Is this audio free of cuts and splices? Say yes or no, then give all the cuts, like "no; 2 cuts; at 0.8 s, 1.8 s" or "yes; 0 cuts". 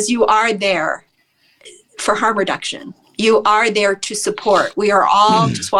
yes; 0 cuts